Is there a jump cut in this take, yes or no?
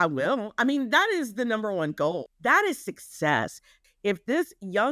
yes